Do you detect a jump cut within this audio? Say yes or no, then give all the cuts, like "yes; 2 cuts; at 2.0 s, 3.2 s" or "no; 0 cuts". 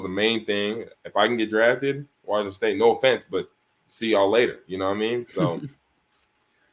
no; 0 cuts